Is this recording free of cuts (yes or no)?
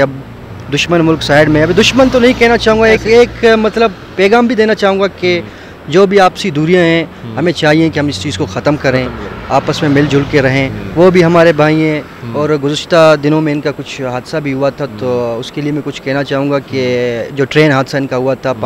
yes